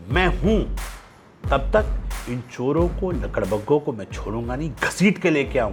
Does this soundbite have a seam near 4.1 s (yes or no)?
no